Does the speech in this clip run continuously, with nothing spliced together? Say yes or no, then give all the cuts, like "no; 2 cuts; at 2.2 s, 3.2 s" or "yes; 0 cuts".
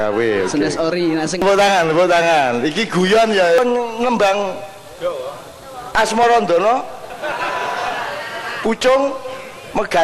no; 2 cuts; at 1.4 s, 3.6 s